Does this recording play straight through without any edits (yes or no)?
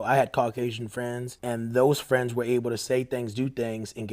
no